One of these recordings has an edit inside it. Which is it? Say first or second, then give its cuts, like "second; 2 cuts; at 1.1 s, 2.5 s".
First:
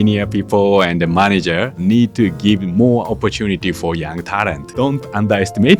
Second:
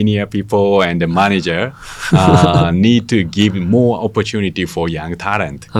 first; 2 cuts; at 1.8 s, 4.7 s